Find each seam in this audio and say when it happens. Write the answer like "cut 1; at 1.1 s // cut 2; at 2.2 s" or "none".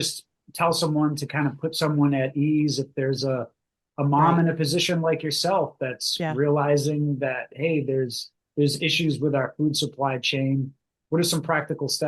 none